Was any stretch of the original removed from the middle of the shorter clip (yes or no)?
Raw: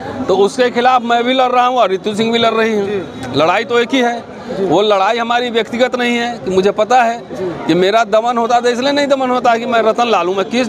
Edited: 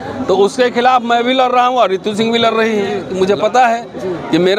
yes